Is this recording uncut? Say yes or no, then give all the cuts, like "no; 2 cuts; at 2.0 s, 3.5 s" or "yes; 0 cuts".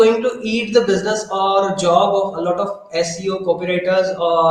yes; 0 cuts